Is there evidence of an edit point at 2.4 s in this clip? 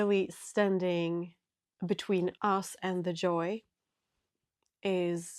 yes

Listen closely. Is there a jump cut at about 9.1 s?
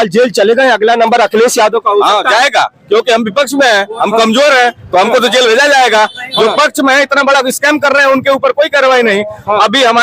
no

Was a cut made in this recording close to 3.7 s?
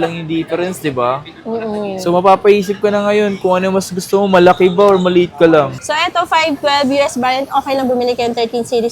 no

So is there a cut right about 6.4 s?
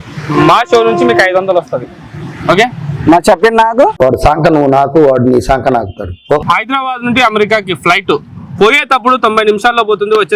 yes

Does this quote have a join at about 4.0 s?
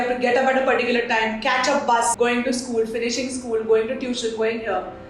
no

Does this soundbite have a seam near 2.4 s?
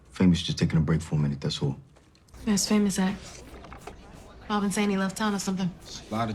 yes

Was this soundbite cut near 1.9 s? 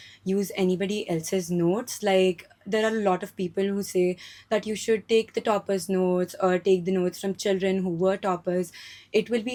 no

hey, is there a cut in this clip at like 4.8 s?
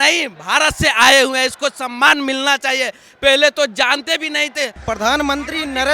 yes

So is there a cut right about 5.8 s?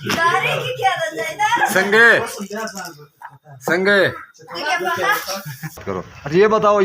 yes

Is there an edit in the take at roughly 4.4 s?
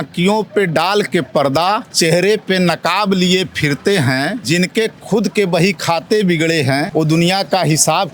yes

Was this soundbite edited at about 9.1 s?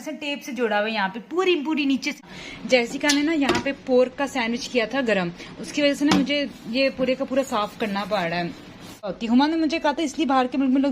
yes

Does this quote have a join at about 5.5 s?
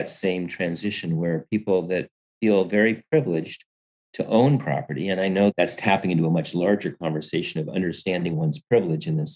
yes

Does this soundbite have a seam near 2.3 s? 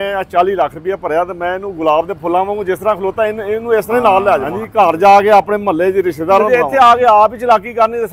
no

